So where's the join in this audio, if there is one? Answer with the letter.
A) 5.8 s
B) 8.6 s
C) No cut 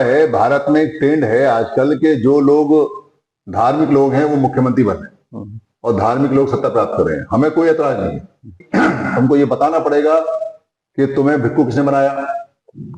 B